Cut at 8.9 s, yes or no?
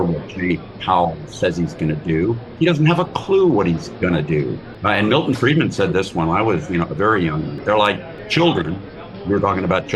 no